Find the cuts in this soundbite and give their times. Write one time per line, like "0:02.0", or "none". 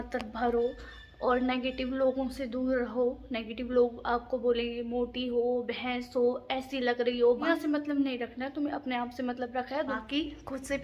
0:07.5
0:09.9